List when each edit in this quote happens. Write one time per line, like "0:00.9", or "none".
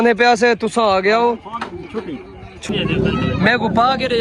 0:02.6